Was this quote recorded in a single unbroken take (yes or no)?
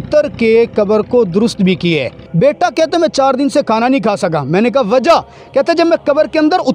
no